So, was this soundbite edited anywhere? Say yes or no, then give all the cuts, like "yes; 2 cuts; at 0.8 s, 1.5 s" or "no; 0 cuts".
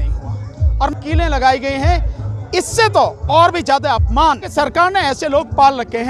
yes; 2 cuts; at 0.9 s, 4.5 s